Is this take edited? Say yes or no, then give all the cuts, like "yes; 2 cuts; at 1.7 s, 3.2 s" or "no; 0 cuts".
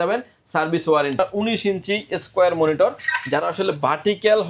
yes; 1 cut; at 1.2 s